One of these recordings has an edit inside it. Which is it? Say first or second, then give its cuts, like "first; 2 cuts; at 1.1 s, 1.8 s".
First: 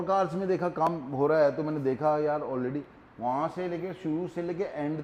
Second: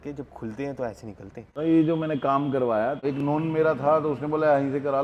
second; 2 cuts; at 1.6 s, 3.0 s